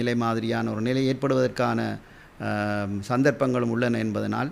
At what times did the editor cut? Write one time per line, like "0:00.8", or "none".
none

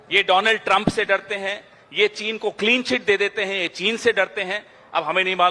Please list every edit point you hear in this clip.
none

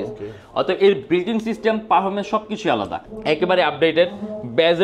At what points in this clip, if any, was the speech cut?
0:03.1

